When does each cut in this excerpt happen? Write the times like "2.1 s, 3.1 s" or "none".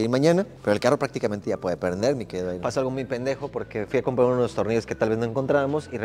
2.6 s

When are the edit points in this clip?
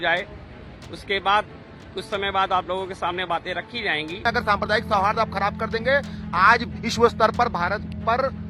4.2 s

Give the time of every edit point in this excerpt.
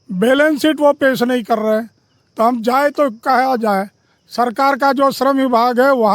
none

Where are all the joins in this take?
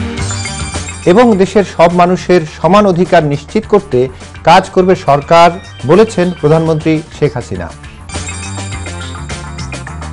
0.9 s

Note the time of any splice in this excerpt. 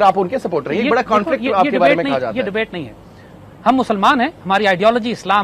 none

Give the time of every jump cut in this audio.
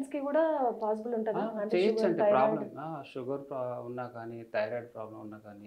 none

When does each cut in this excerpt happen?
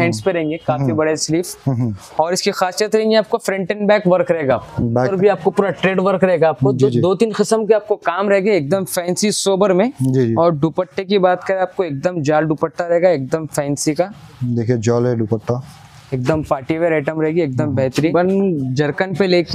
5.1 s, 18.0 s

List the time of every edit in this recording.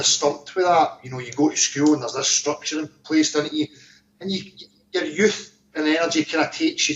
1.5 s

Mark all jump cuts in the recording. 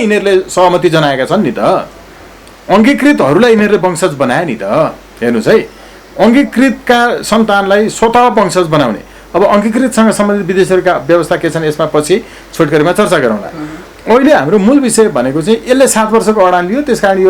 none

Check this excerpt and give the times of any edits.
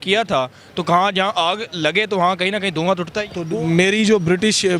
3.4 s

